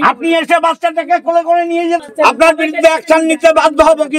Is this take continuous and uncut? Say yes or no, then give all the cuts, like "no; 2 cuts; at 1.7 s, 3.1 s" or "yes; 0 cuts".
no; 1 cut; at 2.1 s